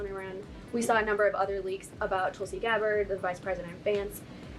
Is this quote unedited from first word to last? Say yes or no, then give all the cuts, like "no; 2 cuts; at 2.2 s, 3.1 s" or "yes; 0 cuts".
yes; 0 cuts